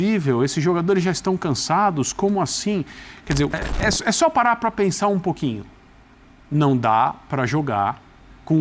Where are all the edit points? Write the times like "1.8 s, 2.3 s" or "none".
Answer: 3.6 s